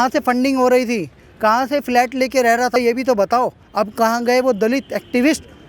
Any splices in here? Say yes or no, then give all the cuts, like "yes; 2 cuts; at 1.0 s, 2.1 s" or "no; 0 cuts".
yes; 2 cuts; at 2.8 s, 3.6 s